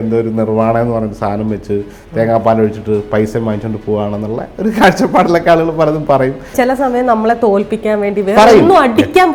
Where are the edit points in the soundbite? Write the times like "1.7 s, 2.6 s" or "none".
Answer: 6.5 s